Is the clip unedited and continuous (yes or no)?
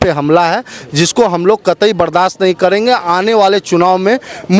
yes